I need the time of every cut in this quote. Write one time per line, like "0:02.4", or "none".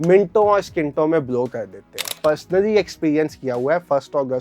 0:02.2